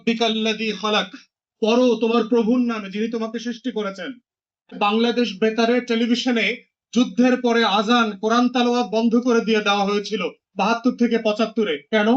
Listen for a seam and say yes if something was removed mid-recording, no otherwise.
yes